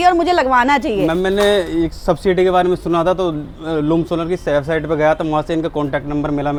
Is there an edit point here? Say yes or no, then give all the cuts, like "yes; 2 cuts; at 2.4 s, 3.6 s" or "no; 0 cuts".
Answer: no; 0 cuts